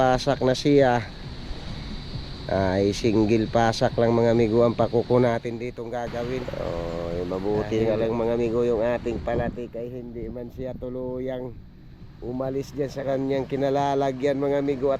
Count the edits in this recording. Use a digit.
1